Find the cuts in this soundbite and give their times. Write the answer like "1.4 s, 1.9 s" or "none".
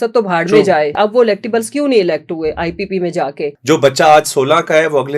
1.0 s, 3.6 s